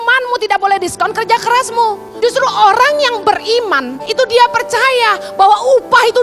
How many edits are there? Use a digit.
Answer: 2